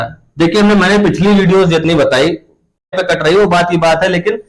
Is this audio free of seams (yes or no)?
no